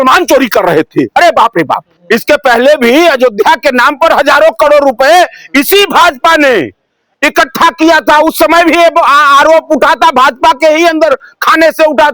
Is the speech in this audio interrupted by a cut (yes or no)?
yes